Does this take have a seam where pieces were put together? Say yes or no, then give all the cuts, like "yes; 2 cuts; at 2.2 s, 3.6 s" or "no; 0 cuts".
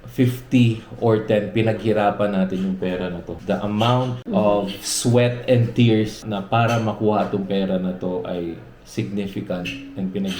yes; 3 cuts; at 3.3 s, 4.2 s, 6.2 s